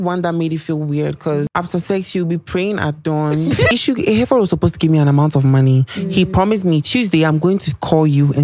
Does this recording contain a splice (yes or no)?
yes